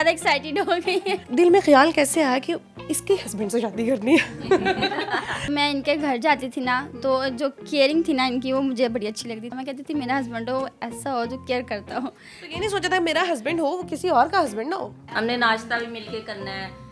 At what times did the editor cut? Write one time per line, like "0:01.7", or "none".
0:01.2
0:05.5
0:09.5
0:15.0